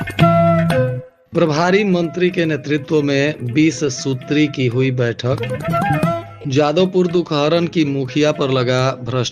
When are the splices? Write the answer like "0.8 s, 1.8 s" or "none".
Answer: 1.1 s

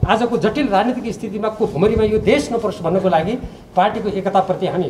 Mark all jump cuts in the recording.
none

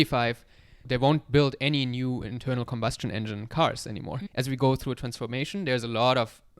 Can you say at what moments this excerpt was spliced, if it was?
4.3 s

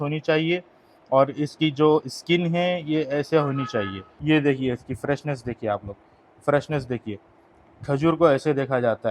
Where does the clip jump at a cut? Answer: 4.0 s

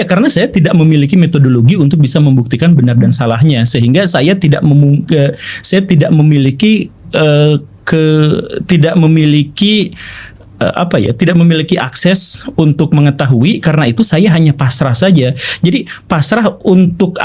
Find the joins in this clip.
none

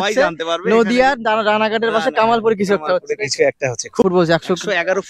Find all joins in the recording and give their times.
4.0 s

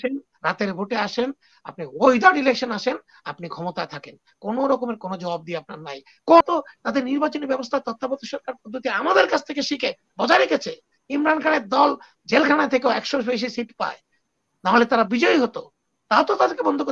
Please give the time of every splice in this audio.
6.4 s

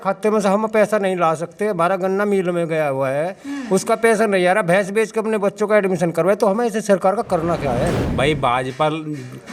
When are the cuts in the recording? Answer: 8.0 s

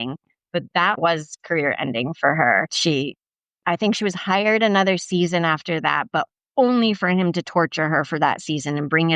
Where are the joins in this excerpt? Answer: 1.0 s, 2.7 s

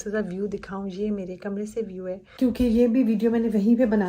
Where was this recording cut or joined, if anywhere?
2.2 s

